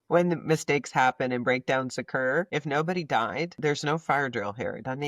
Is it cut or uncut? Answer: cut